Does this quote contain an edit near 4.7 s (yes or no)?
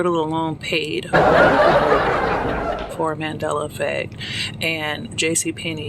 no